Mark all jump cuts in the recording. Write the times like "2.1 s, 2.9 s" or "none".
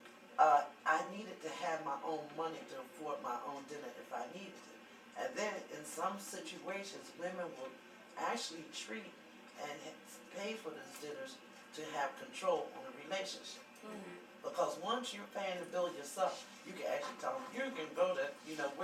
none